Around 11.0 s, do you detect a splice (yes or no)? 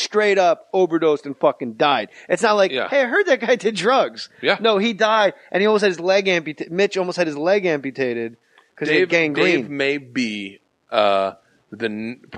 yes